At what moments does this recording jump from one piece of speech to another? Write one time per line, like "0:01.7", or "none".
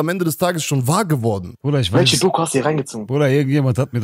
0:01.5